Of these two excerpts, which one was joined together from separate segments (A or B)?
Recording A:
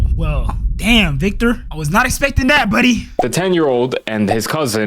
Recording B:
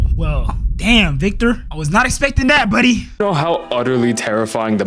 A